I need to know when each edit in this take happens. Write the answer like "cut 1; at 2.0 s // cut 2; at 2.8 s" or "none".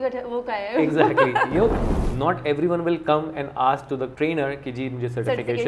cut 1; at 1.8 s // cut 2; at 4.1 s